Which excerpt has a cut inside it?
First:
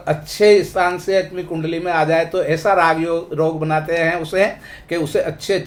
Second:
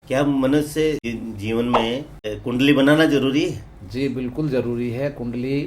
second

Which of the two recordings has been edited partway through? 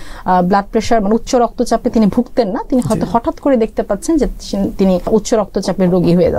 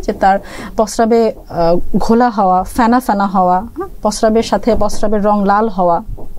first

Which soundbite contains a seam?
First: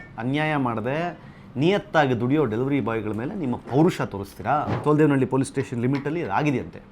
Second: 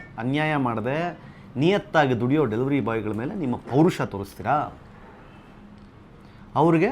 first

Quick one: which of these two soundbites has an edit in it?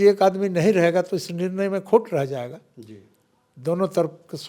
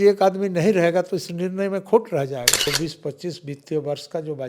second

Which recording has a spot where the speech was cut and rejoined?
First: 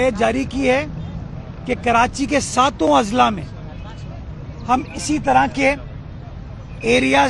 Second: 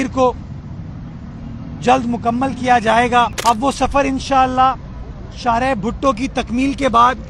second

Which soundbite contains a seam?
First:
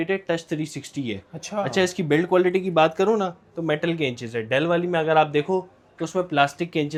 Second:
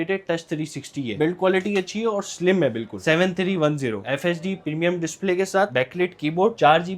second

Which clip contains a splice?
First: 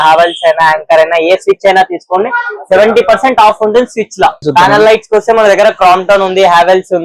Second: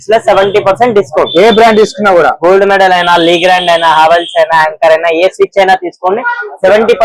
first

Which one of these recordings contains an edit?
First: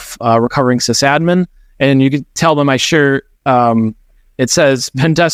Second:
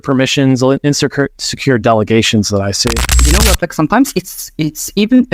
second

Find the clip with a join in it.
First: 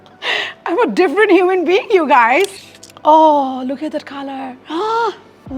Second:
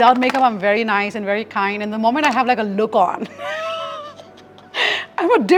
first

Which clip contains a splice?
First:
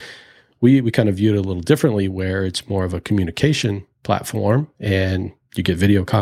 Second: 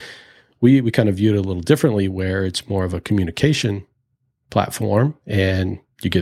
first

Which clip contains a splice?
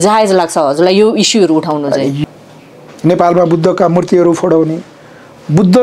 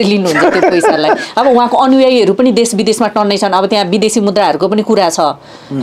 first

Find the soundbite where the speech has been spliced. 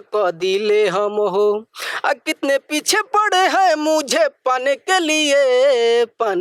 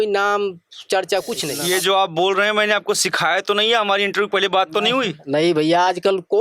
second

